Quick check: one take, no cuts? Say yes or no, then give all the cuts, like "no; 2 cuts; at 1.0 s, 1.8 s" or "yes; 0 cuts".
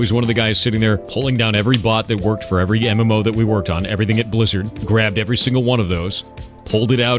yes; 0 cuts